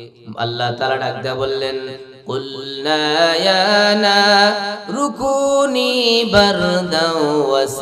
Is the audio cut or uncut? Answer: uncut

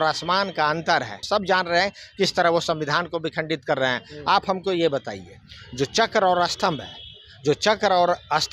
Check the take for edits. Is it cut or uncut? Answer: cut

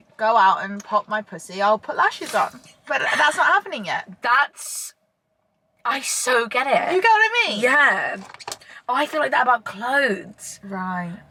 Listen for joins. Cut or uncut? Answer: uncut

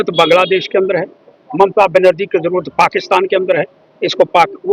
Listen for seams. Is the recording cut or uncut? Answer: uncut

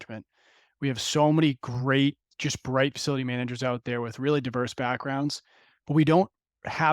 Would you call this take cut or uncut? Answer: cut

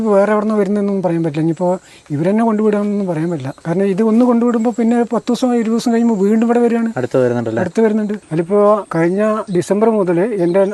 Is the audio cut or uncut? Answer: cut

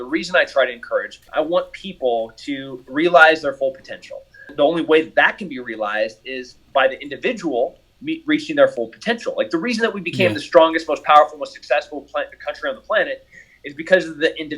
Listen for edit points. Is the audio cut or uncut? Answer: cut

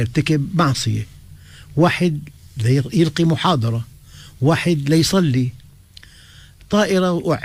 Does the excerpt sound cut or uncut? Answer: uncut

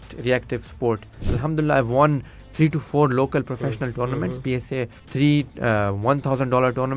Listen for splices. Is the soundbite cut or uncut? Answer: cut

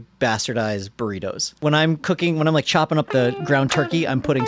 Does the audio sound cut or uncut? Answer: cut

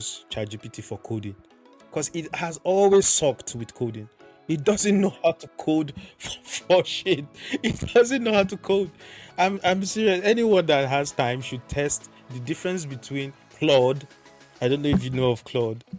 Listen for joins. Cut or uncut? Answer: uncut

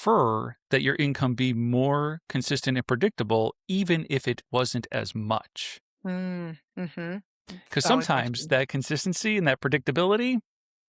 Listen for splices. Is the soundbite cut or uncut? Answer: uncut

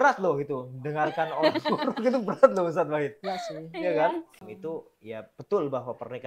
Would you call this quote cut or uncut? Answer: cut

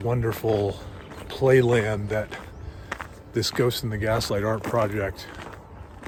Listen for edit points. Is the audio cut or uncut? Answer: uncut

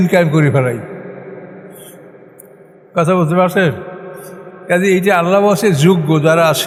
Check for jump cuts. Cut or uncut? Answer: uncut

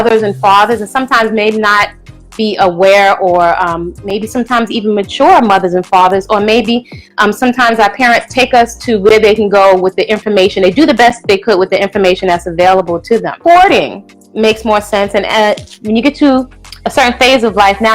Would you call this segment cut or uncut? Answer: cut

